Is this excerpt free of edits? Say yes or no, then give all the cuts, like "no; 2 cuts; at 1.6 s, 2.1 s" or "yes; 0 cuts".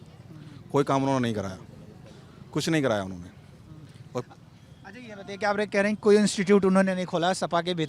yes; 0 cuts